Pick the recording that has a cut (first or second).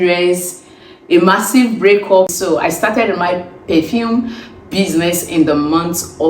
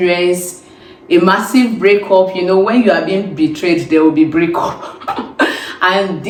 first